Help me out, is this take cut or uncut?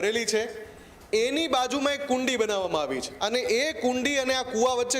cut